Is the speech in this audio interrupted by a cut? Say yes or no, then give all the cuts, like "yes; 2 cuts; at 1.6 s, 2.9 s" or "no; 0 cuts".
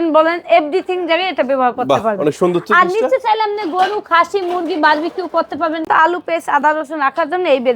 yes; 1 cut; at 5.9 s